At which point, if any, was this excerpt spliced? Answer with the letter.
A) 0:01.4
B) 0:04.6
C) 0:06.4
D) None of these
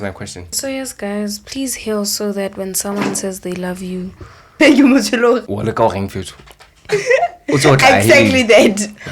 B